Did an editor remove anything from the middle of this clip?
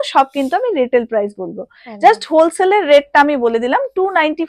no; 0 cuts

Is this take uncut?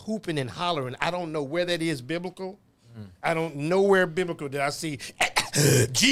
yes; 0 cuts

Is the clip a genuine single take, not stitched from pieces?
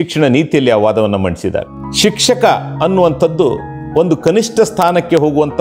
no; 1 cut; at 1.8 s

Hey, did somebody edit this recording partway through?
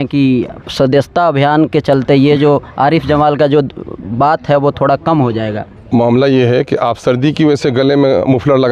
no; 0 cuts

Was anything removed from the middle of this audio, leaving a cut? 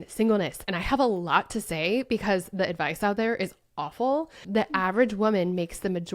yes; 1 cut; at 4.4 s

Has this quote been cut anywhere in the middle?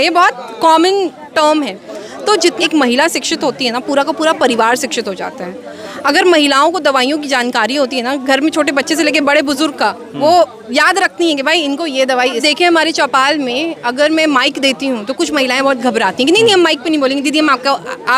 yes; 2 cuts; at 2.6 s, 12.4 s

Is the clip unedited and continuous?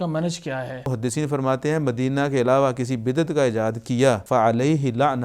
no; 2 cuts; at 0.9 s, 4.2 s

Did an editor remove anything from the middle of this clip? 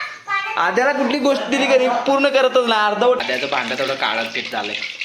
yes; 1 cut; at 3.2 s

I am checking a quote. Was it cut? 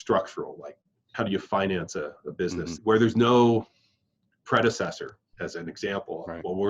yes; 2 cuts; at 1.1 s, 2.7 s

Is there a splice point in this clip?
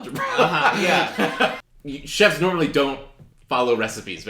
yes; 1 cut; at 1.6 s

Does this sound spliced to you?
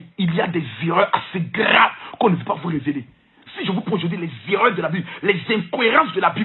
no; 0 cuts

